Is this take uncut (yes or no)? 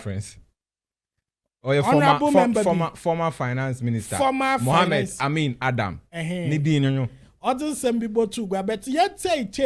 yes